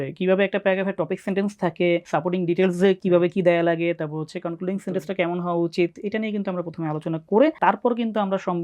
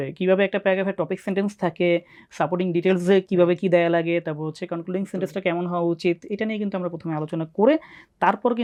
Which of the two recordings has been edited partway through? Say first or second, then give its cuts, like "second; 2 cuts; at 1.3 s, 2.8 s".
first; 2 cuts; at 2.1 s, 7.6 s